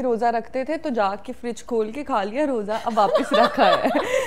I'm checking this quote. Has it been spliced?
no; 0 cuts

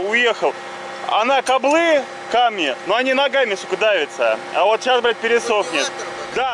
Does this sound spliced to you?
no; 0 cuts

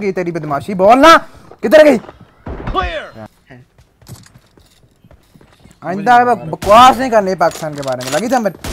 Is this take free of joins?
no; 1 cut; at 3.3 s

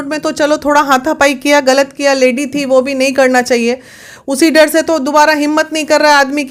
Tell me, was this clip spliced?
no; 0 cuts

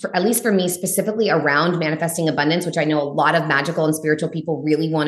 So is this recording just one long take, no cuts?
yes; 0 cuts

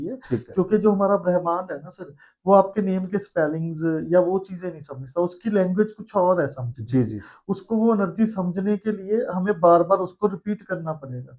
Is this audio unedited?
yes; 0 cuts

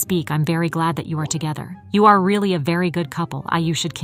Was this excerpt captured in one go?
no; 1 cut; at 1.7 s

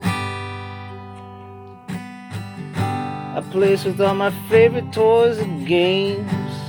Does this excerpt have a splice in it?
no; 0 cuts

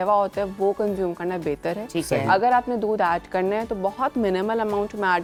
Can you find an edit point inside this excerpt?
no; 0 cuts

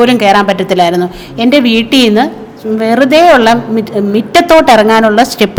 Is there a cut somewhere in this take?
no; 0 cuts

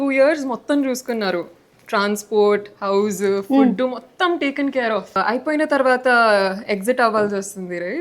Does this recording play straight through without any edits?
yes; 0 cuts

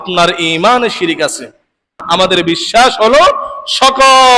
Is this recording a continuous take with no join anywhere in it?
no; 1 cut; at 2.0 s

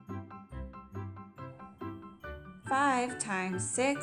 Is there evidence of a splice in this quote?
yes; 1 cut; at 2.5 s

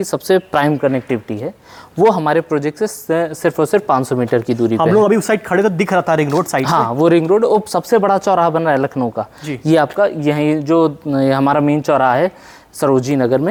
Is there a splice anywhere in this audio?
no; 0 cuts

